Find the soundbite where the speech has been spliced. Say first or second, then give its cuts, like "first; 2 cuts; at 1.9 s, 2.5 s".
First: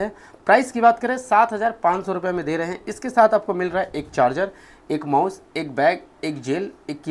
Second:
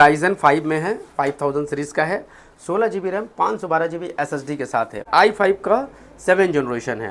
second; 1 cut; at 5.0 s